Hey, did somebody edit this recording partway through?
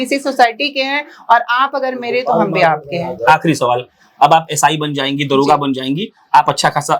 no; 0 cuts

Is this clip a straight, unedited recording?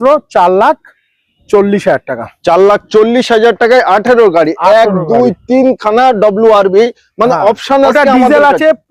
yes; 0 cuts

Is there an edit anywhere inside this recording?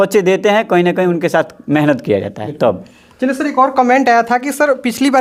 no; 0 cuts

